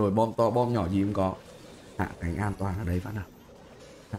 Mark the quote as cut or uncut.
uncut